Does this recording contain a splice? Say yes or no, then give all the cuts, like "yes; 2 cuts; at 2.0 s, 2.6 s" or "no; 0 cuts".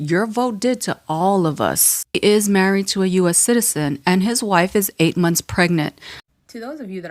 yes; 2 cuts; at 2.2 s, 6.1 s